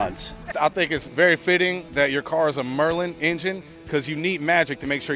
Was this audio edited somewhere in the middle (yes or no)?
yes